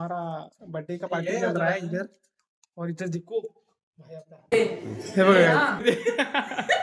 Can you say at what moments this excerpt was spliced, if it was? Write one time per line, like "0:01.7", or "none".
0:04.5
0:05.8